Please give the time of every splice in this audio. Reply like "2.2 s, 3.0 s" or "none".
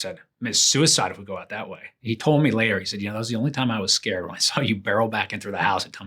1.9 s